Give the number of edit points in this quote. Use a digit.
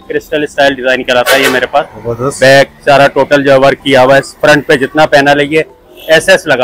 0